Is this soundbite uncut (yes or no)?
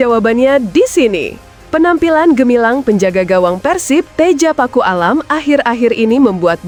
yes